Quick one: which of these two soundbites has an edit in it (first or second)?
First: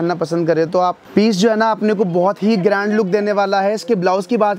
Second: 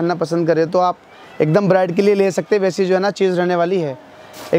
first